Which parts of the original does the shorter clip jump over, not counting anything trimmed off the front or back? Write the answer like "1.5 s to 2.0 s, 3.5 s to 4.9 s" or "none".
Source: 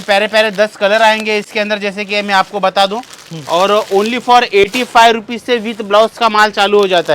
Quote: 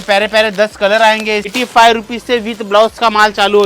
1.5 s to 4.7 s